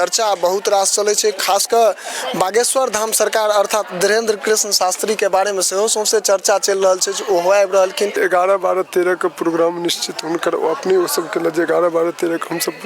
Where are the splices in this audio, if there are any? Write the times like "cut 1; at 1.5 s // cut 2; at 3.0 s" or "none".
cut 1; at 8.1 s